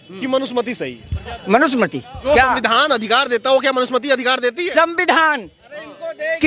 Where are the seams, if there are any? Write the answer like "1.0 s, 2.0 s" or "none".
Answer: 2.1 s

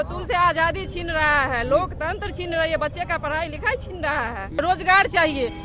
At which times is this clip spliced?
4.6 s

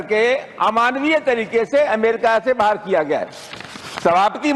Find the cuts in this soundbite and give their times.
none

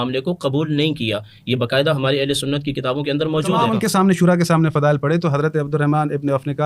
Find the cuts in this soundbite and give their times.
3.7 s

